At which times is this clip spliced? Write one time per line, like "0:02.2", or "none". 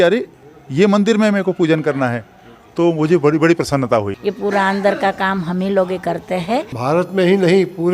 0:04.1
0:06.8